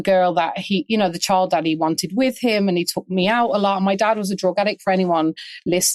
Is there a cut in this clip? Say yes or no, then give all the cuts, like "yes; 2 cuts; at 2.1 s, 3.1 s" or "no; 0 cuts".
no; 0 cuts